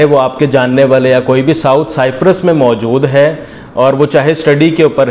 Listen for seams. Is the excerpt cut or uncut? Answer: uncut